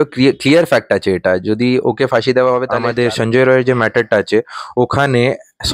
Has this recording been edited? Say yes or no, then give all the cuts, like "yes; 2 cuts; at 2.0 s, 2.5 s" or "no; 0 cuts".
yes; 1 cut; at 2.7 s